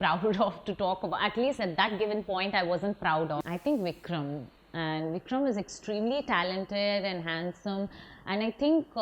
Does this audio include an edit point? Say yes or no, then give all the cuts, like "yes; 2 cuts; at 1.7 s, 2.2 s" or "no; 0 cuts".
yes; 1 cut; at 3.4 s